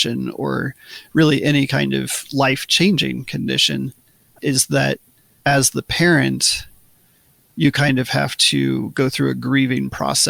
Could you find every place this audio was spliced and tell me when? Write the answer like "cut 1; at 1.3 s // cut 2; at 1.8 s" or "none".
none